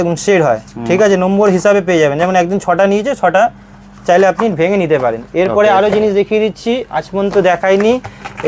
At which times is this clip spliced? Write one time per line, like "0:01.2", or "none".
none